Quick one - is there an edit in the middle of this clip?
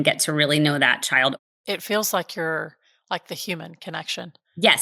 yes; 1 cut; at 1.4 s

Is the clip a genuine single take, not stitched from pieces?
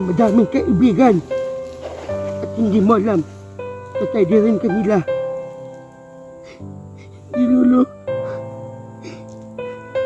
no; 1 cut; at 8.0 s

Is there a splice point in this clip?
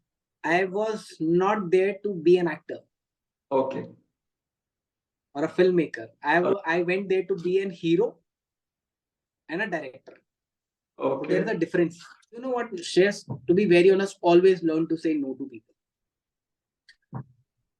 yes; 1 cut; at 12.6 s

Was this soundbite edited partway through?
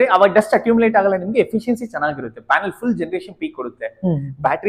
no; 0 cuts

